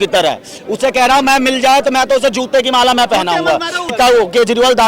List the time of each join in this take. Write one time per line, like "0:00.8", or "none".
0:03.9